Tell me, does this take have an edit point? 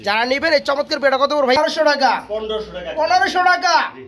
yes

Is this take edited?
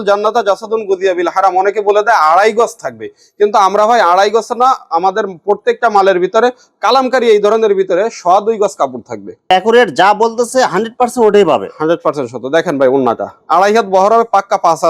no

